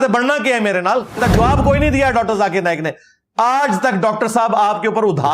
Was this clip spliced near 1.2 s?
yes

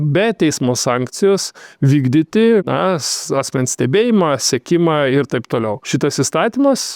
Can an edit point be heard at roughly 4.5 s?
no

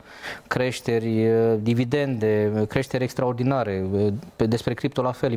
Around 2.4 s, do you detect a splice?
no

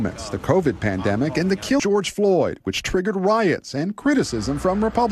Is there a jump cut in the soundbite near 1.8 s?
yes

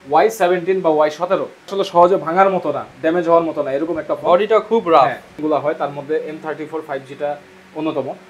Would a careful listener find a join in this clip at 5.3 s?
yes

